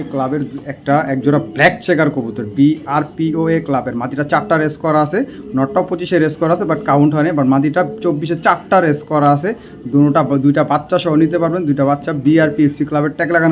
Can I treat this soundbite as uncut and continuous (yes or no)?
yes